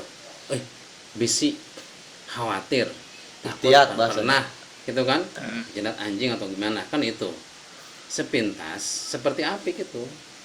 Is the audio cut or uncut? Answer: uncut